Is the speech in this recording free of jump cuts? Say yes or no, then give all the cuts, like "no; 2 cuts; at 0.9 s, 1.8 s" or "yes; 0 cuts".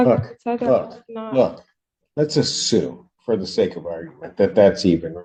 yes; 0 cuts